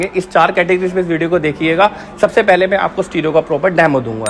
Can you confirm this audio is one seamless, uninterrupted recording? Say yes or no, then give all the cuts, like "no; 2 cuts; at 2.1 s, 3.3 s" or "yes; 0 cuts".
yes; 0 cuts